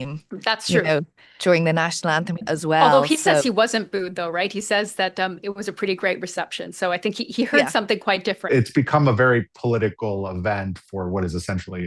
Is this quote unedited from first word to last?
no; 2 cuts; at 2.4 s, 8.5 s

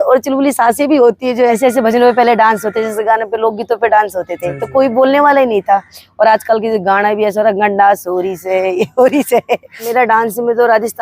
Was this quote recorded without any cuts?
no; 2 cuts; at 1.6 s, 9.8 s

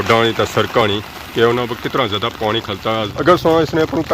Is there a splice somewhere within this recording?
yes; 1 cut; at 3.1 s

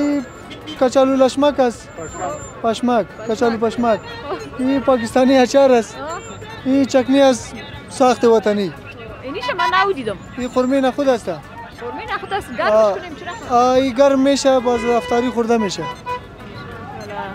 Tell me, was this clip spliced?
no; 0 cuts

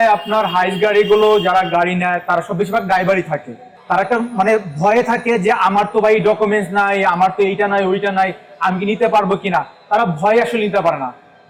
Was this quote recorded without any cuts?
yes; 0 cuts

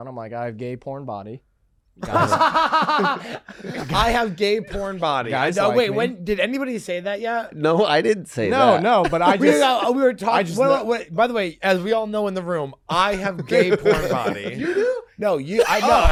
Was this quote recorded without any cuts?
yes; 0 cuts

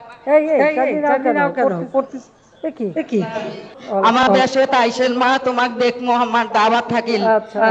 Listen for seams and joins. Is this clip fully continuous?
no; 1 cut; at 3.8 s

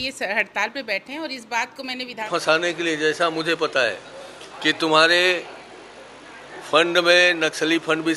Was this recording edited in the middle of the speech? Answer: yes; 1 cut; at 2.3 s

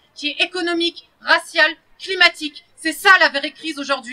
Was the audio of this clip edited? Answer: no; 0 cuts

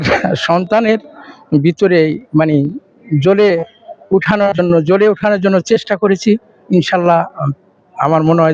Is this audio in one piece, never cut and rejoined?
yes; 0 cuts

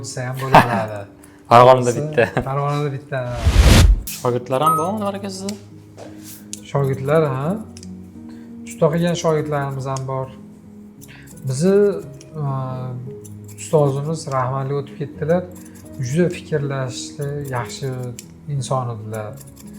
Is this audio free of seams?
no; 1 cut; at 4.0 s

